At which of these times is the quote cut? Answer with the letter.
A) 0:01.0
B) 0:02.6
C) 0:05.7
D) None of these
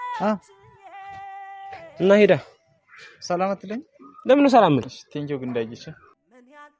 C